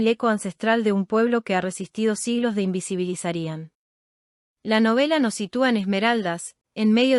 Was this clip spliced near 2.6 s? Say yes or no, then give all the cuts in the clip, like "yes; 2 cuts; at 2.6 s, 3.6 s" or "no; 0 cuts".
no; 0 cuts